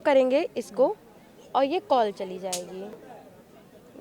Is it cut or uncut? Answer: cut